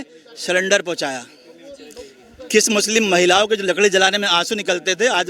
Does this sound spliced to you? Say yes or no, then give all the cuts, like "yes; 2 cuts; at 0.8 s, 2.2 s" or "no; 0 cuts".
no; 0 cuts